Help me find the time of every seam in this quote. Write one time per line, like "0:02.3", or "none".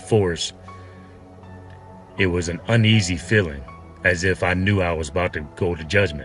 0:00.8
0:02.2